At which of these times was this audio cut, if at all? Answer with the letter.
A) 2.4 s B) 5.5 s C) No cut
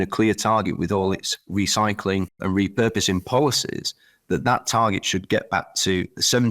A